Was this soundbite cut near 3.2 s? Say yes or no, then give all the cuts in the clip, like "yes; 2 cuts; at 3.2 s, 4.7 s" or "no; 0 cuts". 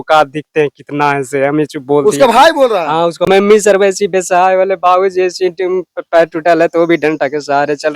yes; 1 cut; at 3.2 s